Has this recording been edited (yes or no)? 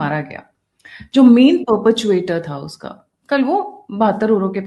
no